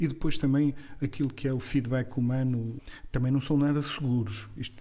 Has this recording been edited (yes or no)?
yes